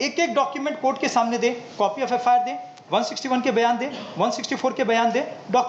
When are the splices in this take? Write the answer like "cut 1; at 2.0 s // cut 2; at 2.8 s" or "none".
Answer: none